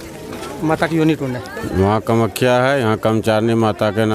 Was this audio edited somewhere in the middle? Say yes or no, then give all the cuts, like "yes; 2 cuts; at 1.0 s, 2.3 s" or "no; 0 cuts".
no; 0 cuts